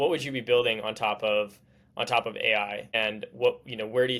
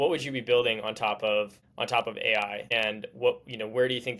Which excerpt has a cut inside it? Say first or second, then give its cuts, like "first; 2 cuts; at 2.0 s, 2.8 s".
second; 1 cut; at 1.6 s